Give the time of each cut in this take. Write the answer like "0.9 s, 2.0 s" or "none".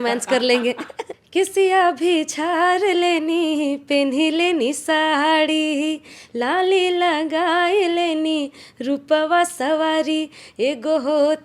1.1 s